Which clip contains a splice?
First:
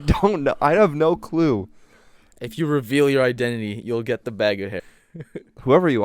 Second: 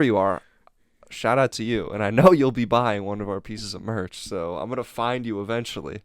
first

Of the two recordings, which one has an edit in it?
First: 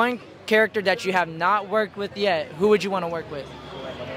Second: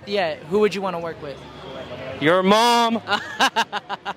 second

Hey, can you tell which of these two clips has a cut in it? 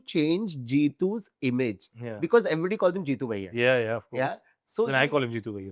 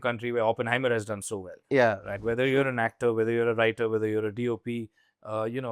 second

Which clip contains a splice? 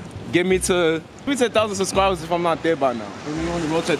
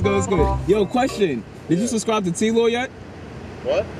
first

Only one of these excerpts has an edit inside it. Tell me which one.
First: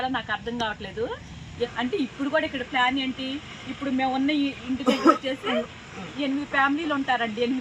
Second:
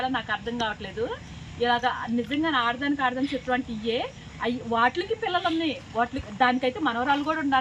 first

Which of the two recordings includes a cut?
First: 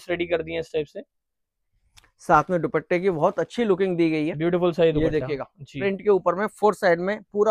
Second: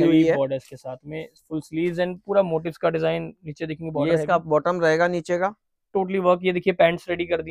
second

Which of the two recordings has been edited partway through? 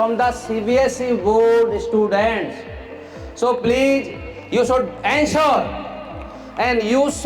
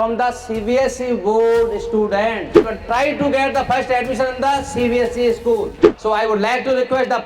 second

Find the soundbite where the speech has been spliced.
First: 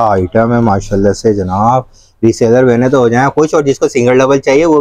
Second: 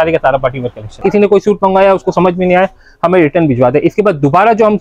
second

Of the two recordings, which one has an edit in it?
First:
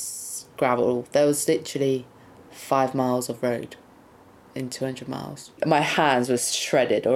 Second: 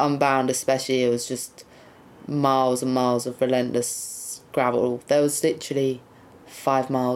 first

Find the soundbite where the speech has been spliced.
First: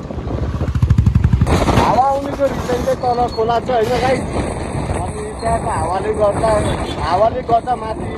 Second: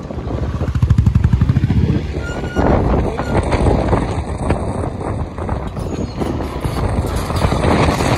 first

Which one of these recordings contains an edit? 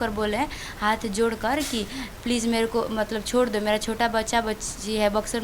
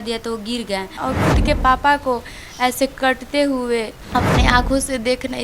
second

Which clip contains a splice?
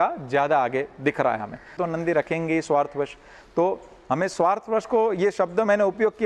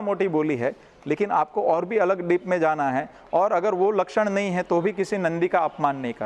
first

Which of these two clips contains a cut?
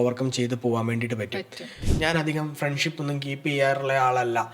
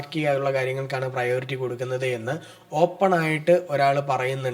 first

